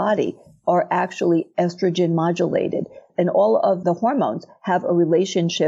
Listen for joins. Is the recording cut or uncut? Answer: uncut